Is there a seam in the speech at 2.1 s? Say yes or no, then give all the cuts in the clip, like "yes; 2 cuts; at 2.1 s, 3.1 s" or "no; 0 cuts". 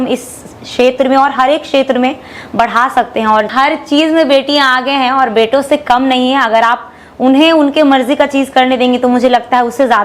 no; 1 cut; at 3.5 s